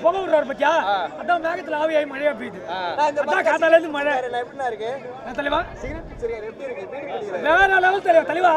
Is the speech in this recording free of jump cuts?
yes; 0 cuts

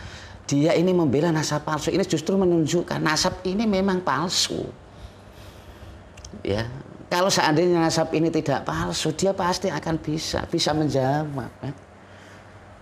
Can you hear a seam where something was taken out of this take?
no; 0 cuts

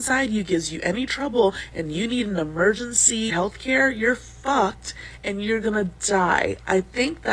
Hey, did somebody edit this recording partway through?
no; 0 cuts

